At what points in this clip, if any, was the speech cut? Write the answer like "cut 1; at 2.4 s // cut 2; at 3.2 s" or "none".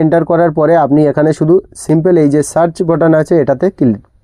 none